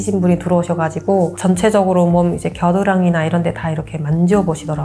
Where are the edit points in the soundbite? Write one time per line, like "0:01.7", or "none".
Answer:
none